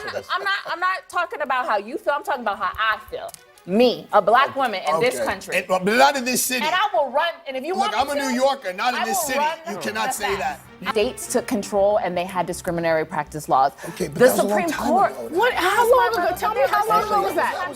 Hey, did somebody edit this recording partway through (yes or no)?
yes